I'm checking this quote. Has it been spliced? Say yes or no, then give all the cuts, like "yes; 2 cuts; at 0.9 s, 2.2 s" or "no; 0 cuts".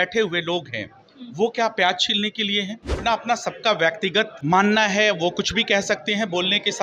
yes; 2 cuts; at 3.0 s, 4.3 s